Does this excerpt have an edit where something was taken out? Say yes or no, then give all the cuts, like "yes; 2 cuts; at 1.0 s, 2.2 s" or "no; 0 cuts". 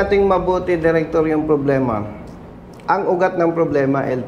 no; 0 cuts